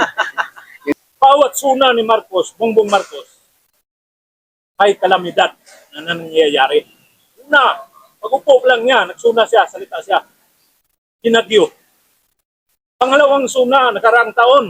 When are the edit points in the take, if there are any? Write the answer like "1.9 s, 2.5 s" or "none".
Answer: 0.9 s